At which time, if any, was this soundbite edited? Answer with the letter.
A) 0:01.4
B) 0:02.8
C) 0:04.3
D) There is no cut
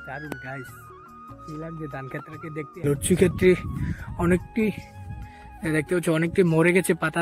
B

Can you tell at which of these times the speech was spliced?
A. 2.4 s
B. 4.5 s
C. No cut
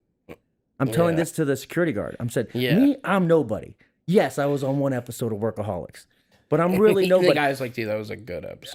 C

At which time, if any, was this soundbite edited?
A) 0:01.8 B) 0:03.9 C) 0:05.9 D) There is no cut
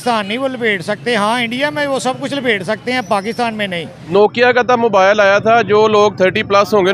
B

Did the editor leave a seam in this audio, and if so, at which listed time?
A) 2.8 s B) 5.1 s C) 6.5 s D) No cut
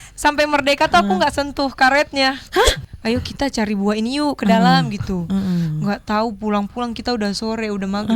A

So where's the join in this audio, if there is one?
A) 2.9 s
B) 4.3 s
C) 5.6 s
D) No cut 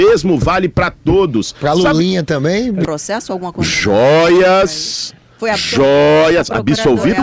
A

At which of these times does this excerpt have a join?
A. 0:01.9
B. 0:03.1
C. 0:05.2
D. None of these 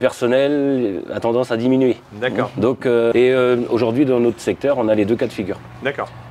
B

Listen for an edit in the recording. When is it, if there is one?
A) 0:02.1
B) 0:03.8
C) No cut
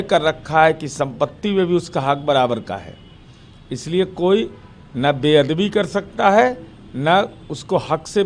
C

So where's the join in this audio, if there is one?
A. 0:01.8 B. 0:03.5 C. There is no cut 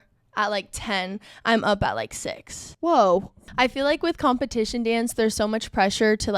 B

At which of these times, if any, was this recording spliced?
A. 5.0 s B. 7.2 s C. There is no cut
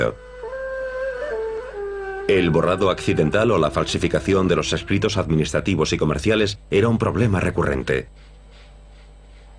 B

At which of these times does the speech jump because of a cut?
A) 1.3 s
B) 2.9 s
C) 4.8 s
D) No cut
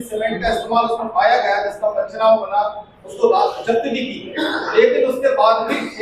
D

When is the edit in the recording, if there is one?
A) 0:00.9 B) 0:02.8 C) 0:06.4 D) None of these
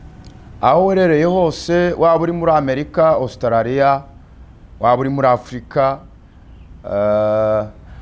D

